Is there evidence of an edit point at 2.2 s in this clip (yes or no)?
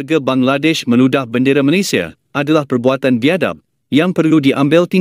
yes